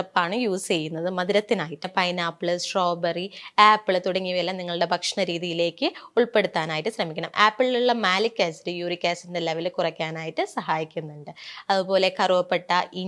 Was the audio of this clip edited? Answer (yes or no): yes